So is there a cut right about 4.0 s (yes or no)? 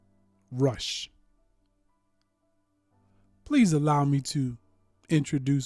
yes